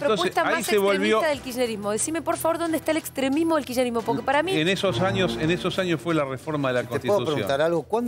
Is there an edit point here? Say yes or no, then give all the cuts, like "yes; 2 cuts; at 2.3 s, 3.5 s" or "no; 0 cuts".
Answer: no; 0 cuts